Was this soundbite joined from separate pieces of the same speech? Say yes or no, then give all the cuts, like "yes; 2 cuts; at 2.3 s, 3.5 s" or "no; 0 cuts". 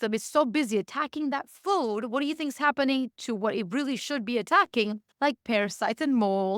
no; 0 cuts